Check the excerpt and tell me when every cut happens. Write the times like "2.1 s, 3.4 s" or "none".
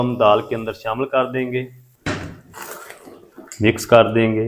1.8 s

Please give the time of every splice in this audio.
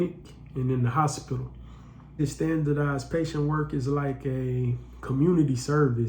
2.2 s

